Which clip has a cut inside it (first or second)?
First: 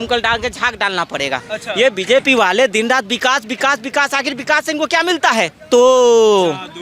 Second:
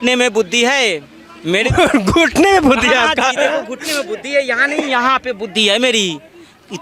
first